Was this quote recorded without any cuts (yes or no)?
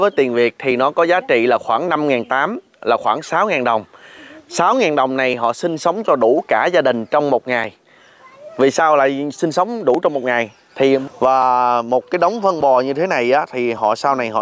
no